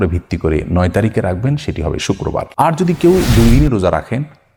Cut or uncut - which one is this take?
cut